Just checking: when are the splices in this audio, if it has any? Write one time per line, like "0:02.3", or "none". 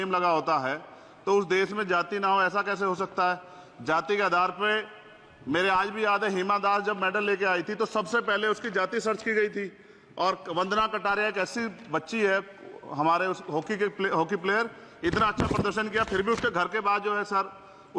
none